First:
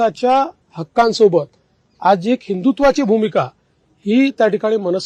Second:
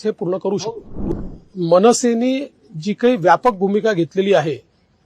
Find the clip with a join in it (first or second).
second